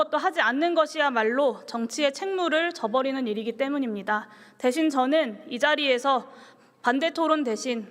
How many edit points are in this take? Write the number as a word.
zero